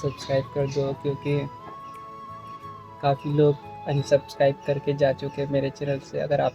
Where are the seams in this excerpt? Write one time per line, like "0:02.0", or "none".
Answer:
none